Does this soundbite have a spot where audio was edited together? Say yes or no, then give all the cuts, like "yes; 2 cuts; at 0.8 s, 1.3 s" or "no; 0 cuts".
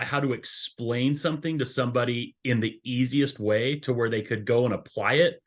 no; 0 cuts